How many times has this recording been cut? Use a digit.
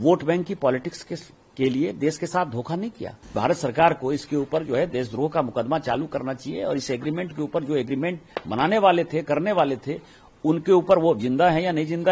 1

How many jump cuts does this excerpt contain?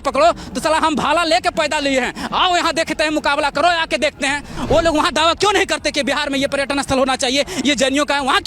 1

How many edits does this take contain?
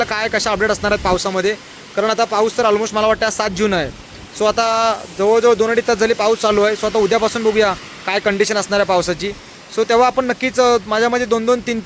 0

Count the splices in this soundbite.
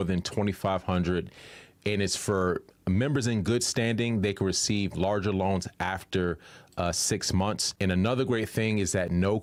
0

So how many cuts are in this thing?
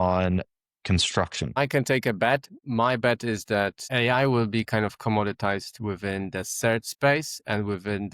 3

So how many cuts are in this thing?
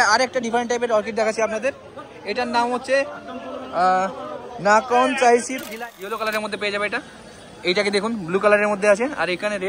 1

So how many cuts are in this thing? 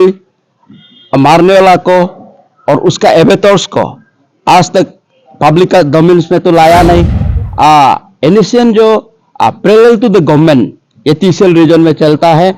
1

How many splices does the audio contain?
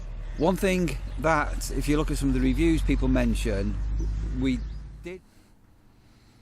1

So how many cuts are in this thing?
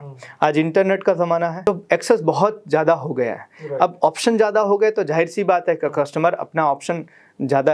1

